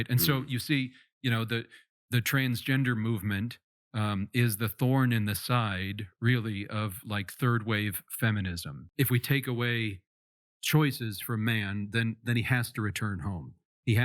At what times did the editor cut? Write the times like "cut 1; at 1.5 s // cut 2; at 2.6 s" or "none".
cut 1; at 8.8 s